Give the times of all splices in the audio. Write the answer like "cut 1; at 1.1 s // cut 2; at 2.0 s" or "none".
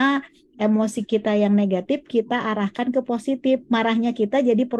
none